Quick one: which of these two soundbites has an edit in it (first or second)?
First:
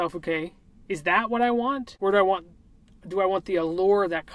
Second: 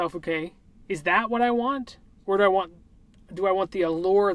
first